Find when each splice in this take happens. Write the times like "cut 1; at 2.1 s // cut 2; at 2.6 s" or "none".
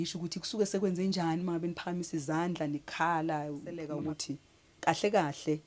cut 1; at 3.9 s